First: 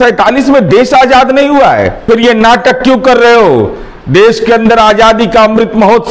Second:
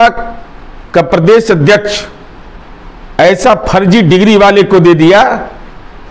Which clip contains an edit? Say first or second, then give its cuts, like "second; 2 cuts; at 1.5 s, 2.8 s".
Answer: first; 1 cut; at 2.0 s